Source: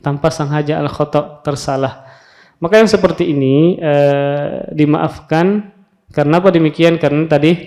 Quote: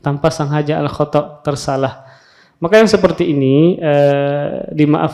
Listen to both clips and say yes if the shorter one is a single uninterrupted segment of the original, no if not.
yes